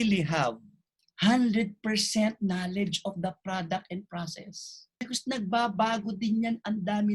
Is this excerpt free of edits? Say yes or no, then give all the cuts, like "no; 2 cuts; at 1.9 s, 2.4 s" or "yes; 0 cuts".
no; 1 cut; at 5.1 s